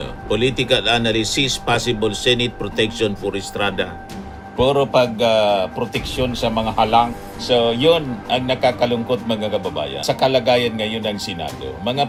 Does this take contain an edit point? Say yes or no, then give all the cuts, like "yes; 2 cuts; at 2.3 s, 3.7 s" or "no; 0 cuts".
no; 0 cuts